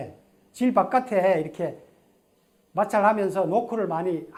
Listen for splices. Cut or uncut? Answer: uncut